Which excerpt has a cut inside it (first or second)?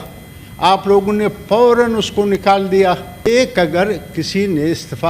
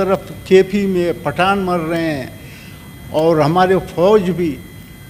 first